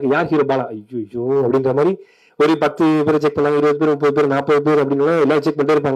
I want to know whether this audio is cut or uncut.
uncut